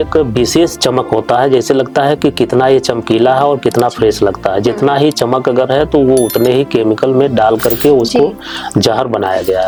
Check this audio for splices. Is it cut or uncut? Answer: uncut